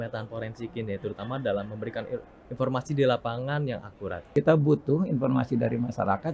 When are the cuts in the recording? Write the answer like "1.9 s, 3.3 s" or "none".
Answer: 4.2 s